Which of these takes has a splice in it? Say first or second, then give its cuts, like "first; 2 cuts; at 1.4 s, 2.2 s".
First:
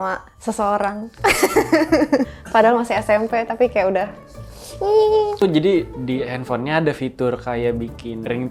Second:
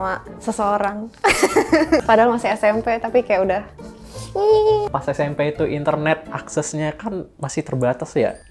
second; 2 cuts; at 2.0 s, 4.9 s